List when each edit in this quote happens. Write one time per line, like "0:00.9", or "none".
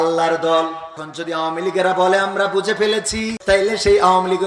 0:01.0
0:03.3

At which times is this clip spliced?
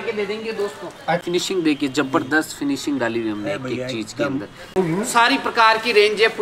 0:01.2
0:04.8

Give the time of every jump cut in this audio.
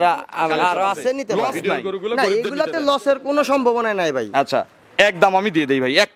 0:02.2

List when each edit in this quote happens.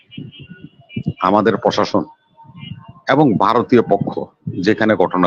none

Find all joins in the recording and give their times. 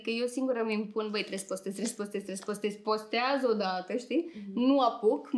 none

